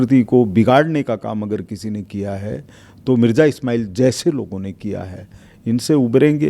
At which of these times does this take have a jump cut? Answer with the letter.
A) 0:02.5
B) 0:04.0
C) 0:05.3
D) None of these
D